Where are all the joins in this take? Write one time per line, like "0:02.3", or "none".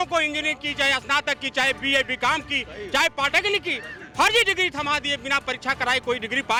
none